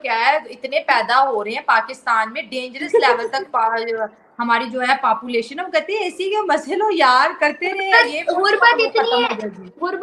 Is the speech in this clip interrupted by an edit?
no; 0 cuts

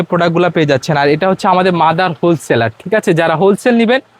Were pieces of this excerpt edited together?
no; 0 cuts

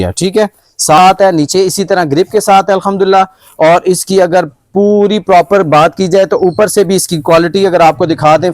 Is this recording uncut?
no; 1 cut; at 1.0 s

